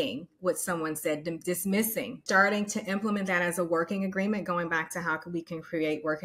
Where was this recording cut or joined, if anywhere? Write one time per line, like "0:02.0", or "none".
0:02.2

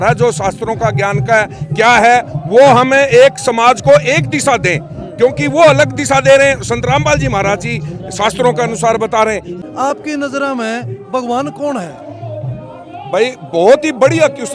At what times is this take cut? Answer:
0:09.6

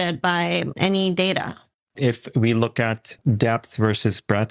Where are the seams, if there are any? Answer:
0:01.7
0:03.1

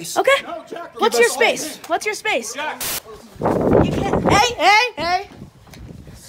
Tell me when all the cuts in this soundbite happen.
0:02.9

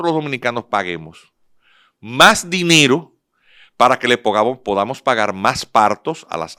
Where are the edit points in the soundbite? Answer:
none

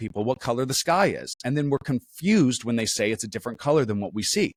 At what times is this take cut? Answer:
none

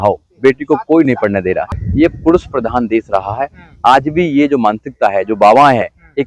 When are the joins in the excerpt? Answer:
0:01.8

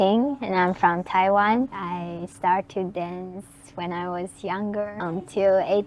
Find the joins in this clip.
0:01.8
0:04.9

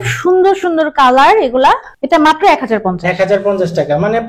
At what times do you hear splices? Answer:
0:01.9

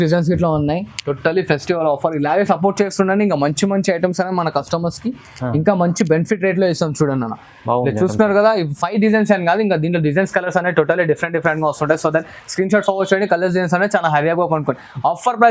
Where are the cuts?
none

